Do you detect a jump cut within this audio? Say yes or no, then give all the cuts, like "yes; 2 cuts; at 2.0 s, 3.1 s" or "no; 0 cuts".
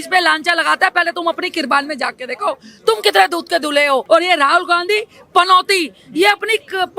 yes; 1 cut; at 4.0 s